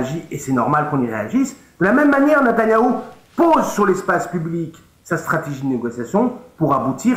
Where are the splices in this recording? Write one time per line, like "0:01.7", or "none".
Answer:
none